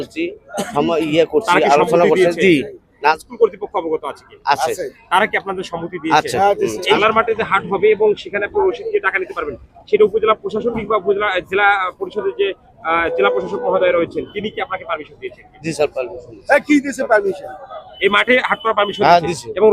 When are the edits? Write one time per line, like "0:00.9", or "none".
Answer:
0:03.2
0:07.0
0:17.8